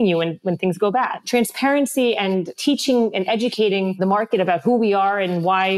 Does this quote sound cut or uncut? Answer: cut